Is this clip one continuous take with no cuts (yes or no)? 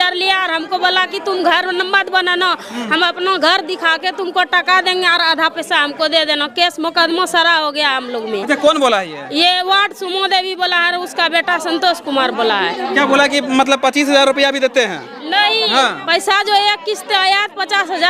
yes